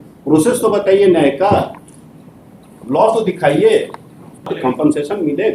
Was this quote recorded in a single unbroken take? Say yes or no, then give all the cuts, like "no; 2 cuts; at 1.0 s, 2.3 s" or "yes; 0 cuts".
no; 1 cut; at 4.5 s